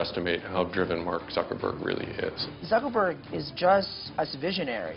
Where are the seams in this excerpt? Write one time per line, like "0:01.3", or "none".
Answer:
0:02.5
0:04.0